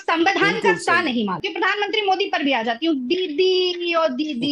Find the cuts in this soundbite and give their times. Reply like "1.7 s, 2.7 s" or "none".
1.5 s